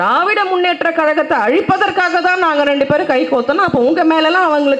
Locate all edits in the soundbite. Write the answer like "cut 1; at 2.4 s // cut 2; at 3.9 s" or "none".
none